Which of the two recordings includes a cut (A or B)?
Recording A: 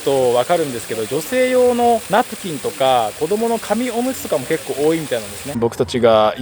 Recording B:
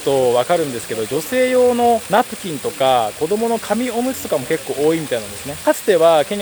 A